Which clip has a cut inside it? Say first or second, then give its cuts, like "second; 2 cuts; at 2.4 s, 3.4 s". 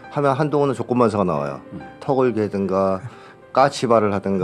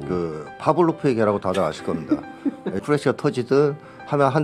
second; 1 cut; at 2.7 s